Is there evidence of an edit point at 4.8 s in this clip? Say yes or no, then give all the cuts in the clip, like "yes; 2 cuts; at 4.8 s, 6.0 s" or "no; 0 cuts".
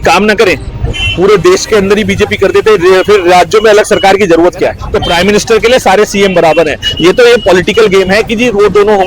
yes; 1 cut; at 4.8 s